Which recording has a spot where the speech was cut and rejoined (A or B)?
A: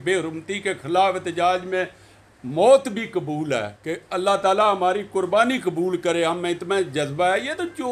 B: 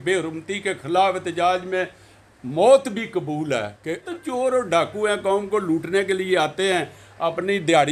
B